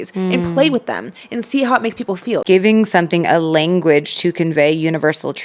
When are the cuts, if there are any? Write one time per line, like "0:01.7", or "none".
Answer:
0:02.4